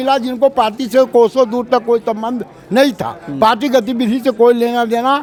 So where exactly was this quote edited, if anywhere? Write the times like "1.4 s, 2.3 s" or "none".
none

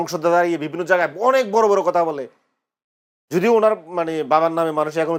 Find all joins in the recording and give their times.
none

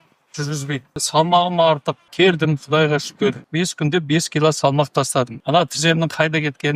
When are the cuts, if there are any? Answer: 1.0 s, 2.1 s, 3.5 s, 5.4 s

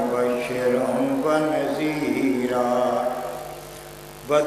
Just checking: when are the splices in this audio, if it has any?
2.9 s

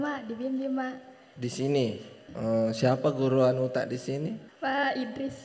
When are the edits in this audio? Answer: 2.3 s, 4.5 s

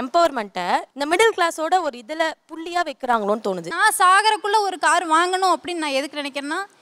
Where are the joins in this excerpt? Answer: 0.9 s, 3.7 s

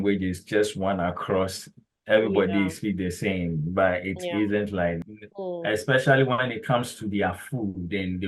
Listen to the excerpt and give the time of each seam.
5.0 s

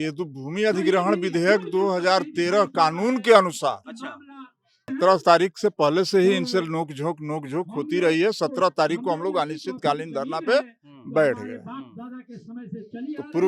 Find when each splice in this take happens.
4.9 s

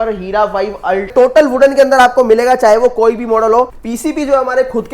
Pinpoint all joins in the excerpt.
1.1 s, 3.8 s

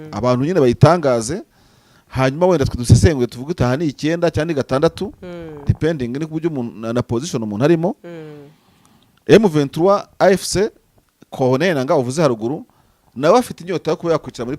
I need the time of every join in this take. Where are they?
none

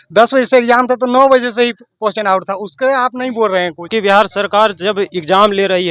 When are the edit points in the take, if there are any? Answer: 3.9 s

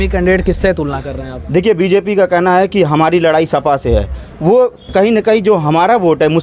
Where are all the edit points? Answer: none

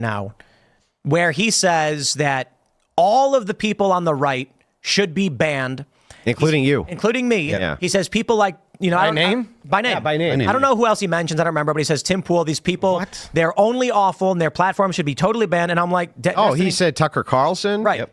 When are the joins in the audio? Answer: none

